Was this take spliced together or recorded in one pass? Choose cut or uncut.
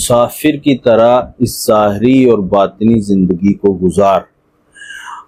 uncut